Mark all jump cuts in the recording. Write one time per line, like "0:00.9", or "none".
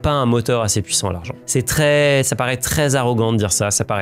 none

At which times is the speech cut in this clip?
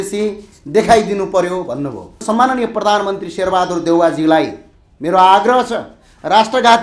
0:02.2

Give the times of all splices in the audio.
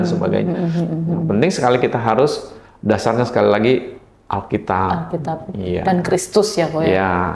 none

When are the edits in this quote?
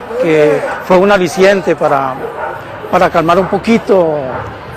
0:02.6

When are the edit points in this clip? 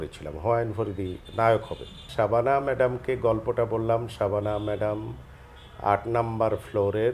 0:02.0

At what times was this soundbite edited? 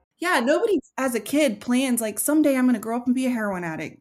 0:00.9

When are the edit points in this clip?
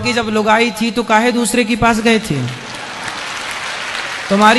none

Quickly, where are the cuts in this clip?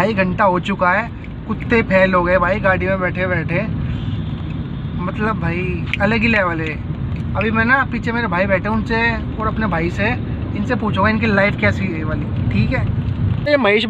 none

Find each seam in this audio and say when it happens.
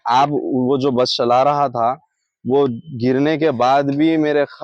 none

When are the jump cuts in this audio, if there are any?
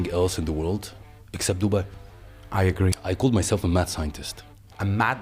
0:03.0

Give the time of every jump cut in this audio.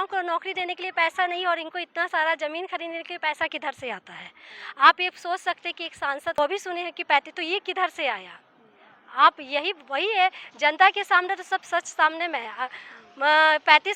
0:06.4

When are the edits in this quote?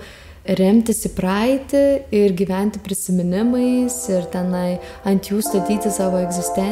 none

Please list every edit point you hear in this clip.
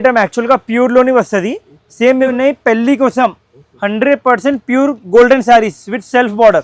0:02.2

